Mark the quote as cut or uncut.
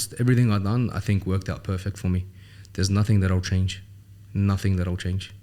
uncut